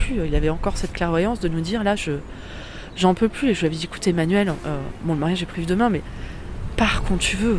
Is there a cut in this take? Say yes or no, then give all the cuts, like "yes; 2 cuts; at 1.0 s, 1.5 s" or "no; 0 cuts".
no; 0 cuts